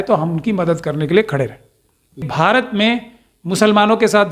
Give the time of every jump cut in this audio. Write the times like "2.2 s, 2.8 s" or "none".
2.2 s

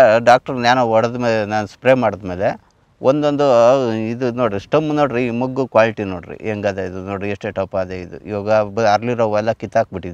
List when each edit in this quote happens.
none

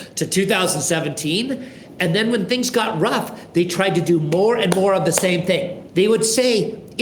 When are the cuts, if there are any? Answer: 5.8 s

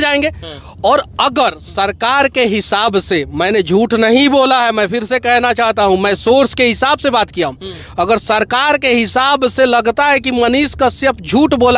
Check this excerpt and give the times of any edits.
none

